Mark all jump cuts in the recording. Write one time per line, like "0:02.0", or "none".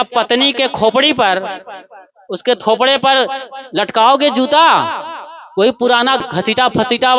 0:06.2